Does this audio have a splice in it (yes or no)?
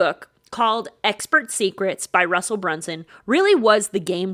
no